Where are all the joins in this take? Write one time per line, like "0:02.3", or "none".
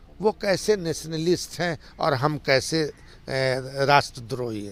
none